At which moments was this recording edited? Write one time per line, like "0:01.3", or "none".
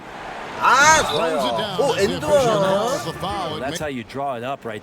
0:03.6

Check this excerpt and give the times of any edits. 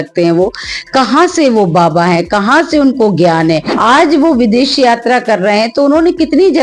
0:03.7

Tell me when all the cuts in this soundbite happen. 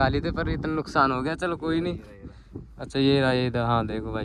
none

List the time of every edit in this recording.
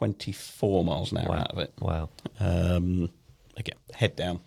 none

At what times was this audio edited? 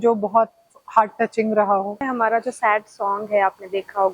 0:02.0

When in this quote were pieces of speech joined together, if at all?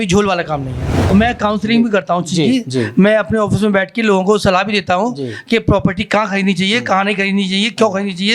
0:01.1

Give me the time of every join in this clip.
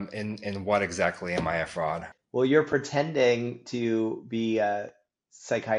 0:02.1

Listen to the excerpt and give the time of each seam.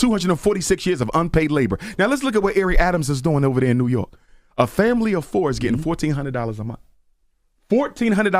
0:04.2

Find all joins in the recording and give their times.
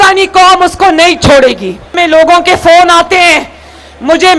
0:02.0

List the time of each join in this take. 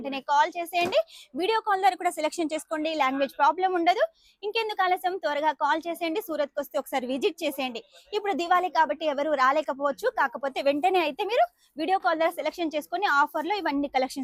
none

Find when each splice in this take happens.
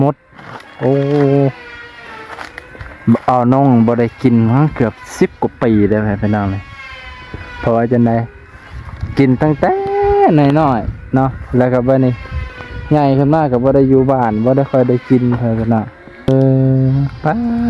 0:16.3

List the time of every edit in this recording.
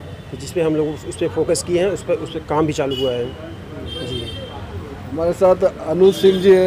none

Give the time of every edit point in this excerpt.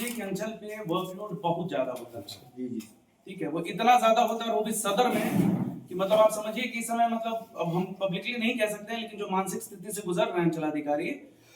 none

